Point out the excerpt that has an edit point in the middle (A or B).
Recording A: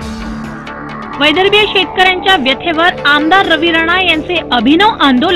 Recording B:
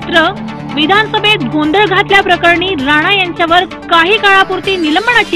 A